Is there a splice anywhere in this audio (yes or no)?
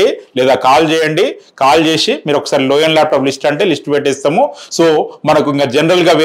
no